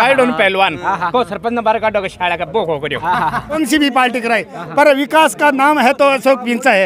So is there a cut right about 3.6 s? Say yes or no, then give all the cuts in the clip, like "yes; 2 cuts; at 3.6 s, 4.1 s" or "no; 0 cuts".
yes; 1 cut; at 3.6 s